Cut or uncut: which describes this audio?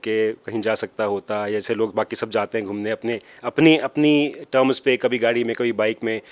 uncut